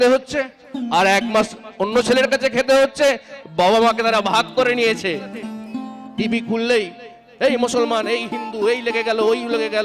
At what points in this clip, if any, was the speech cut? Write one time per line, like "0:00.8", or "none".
0:05.6